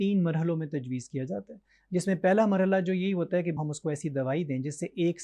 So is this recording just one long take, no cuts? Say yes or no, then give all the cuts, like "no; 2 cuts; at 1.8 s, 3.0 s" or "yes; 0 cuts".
no; 1 cut; at 3.5 s